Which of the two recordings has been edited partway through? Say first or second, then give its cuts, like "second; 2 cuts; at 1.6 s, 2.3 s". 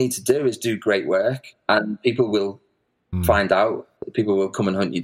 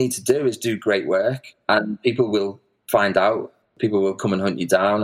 second; 1 cut; at 2.7 s